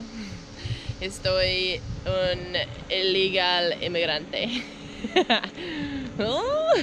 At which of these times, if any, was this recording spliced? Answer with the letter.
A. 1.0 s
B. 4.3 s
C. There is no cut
C